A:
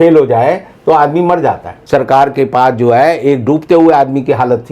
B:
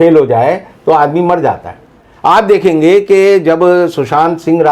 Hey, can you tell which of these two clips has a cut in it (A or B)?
A